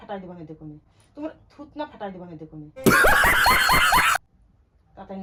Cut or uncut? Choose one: uncut